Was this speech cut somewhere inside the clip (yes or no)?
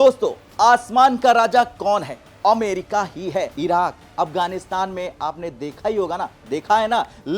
yes